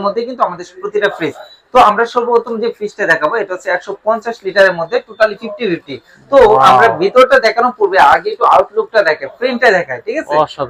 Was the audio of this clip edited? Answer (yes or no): no